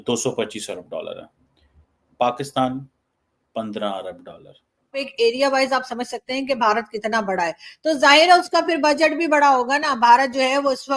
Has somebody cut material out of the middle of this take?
yes; 1 cut; at 5.1 s

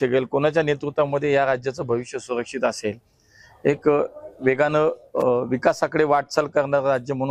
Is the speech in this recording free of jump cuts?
yes; 0 cuts

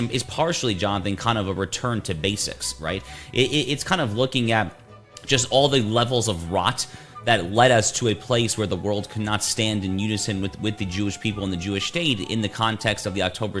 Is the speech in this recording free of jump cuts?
yes; 0 cuts

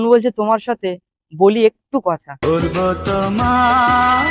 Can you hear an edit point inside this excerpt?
no; 0 cuts

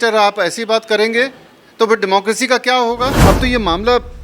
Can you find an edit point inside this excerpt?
yes; 1 cut; at 3.2 s

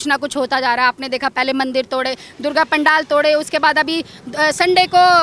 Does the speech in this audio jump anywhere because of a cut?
no; 0 cuts

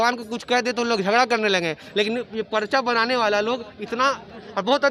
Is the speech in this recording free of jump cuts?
yes; 0 cuts

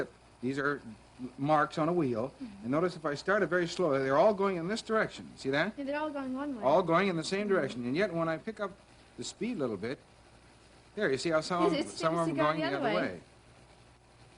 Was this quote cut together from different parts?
yes; 1 cut; at 6.4 s

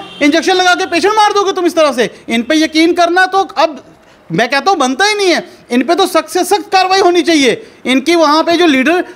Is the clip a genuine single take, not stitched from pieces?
yes; 0 cuts

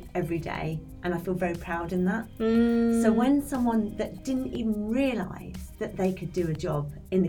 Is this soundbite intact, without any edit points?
yes; 0 cuts

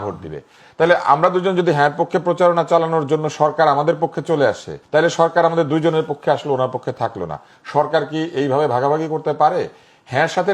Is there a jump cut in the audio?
yes; 1 cut; at 4.7 s

